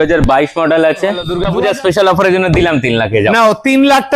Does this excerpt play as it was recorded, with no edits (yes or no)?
no